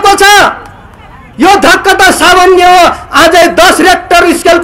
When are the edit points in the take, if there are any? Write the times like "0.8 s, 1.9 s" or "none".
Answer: none